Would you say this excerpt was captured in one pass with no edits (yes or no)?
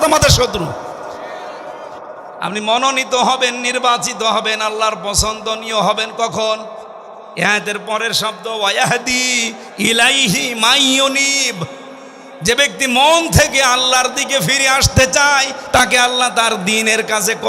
no